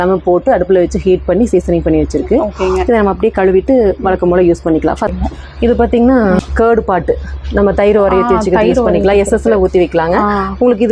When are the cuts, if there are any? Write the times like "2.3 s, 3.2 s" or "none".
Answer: 5.1 s, 6.4 s